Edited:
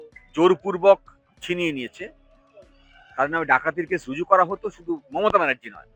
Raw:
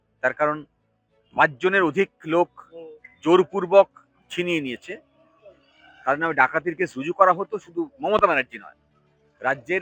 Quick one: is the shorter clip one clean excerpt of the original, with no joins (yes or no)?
yes